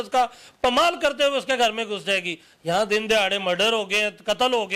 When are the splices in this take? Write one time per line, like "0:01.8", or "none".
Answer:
none